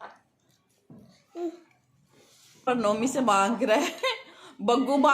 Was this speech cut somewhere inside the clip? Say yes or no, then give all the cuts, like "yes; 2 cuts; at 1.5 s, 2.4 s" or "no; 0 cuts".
yes; 1 cut; at 2.6 s